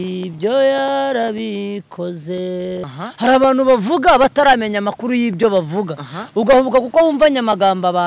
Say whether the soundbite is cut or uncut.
cut